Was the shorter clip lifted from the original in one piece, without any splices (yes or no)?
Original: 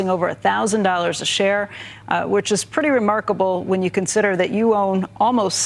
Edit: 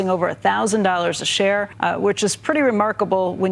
no